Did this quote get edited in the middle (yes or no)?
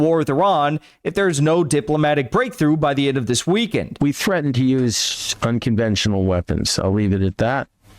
yes